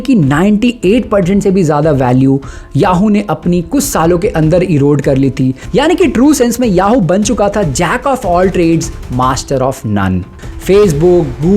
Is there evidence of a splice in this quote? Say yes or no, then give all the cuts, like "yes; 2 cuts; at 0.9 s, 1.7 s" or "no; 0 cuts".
yes; 2 cuts; at 5.6 s, 10.3 s